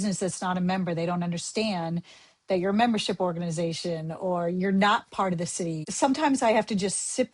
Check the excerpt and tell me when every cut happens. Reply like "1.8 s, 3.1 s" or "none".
5.9 s